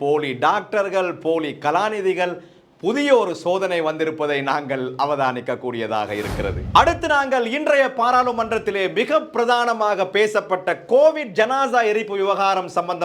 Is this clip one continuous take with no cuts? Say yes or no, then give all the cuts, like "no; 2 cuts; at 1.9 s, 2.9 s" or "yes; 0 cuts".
yes; 0 cuts